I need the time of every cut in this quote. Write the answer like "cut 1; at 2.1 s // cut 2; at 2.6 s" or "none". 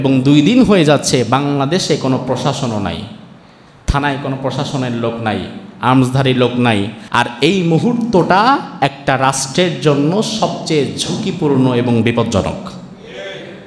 cut 1; at 7.0 s